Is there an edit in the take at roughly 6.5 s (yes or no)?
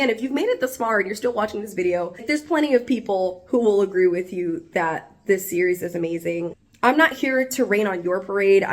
yes